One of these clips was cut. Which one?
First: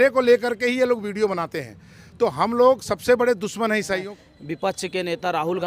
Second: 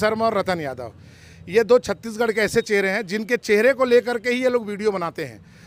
first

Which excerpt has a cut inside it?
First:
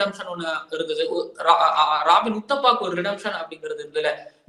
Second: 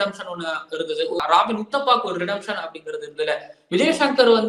second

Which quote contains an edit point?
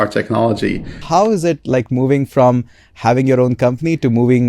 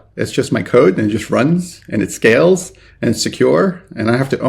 first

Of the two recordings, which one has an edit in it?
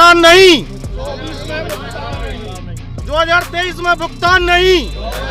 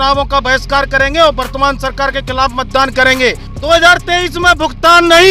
second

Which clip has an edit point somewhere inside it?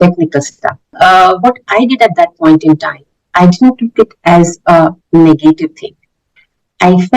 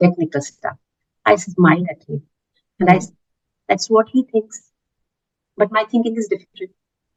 first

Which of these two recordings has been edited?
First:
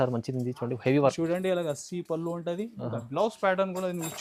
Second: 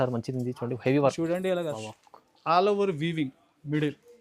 second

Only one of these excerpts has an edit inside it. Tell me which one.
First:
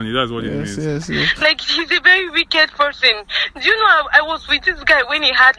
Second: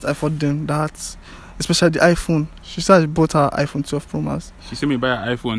first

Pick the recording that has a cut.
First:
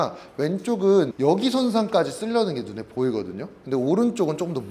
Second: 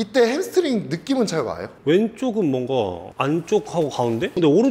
second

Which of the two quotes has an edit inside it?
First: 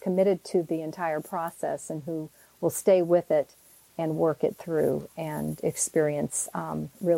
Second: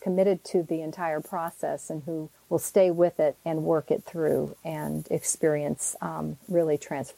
second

